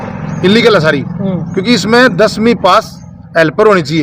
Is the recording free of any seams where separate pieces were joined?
yes; 0 cuts

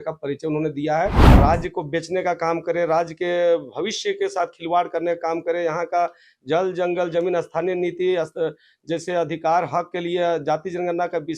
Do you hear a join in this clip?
yes; 1 cut; at 1.4 s

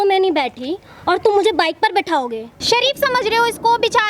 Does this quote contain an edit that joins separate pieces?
yes; 1 cut; at 2.6 s

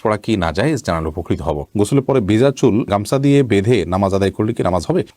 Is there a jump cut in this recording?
yes; 1 cut; at 1.7 s

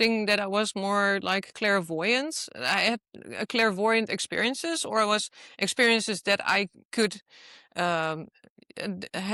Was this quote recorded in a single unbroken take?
yes; 0 cuts

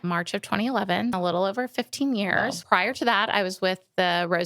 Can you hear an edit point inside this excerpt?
yes; 2 cuts; at 1.2 s, 2.6 s

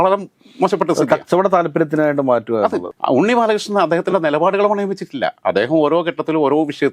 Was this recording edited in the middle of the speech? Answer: yes; 1 cut; at 2.9 s

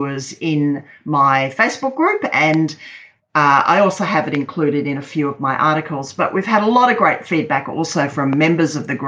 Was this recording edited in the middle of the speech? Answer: no; 0 cuts

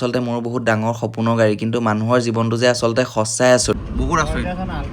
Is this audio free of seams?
no; 1 cut; at 3.7 s

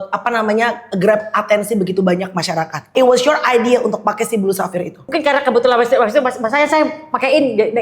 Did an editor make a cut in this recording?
yes; 2 cuts; at 2.9 s, 5.1 s

